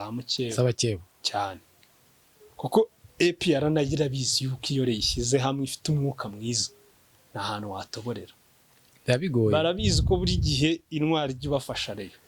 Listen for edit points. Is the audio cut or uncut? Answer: uncut